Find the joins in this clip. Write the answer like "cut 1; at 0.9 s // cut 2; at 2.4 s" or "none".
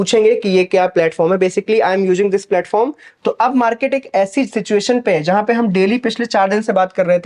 cut 1; at 3.1 s